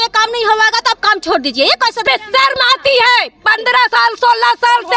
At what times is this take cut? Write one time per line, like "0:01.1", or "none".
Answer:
0:02.0

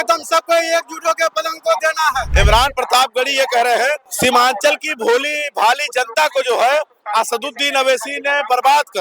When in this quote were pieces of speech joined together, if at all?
0:02.3
0:04.1

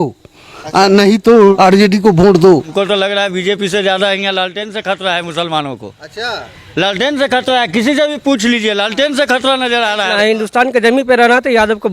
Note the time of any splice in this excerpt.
0:01.5
0:02.7
0:10.1

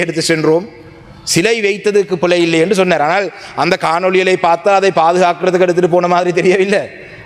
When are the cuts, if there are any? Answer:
none

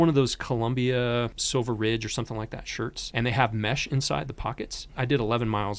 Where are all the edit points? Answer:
0:01.4
0:03.0
0:05.0

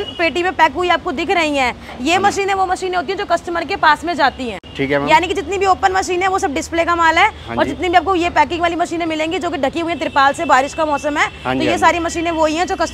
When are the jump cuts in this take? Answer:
none

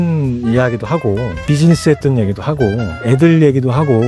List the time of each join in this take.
0:01.4
0:02.9

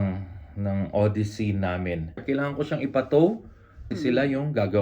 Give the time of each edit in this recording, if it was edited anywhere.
0:02.2
0:03.8

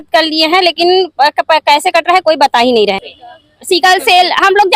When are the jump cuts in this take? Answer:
0:03.1

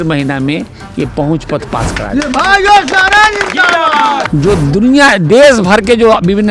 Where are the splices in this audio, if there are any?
0:04.2

